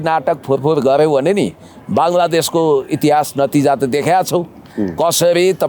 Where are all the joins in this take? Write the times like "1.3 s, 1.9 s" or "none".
none